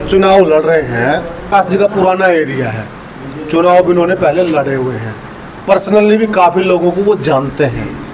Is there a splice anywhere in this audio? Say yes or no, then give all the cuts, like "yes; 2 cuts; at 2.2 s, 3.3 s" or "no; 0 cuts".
yes; 1 cut; at 1.5 s